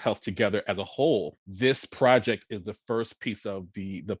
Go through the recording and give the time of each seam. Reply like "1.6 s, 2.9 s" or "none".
1.4 s